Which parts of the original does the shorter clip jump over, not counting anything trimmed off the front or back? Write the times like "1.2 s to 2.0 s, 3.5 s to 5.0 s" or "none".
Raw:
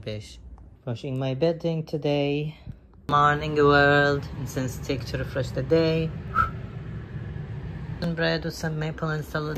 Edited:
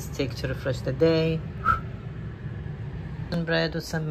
none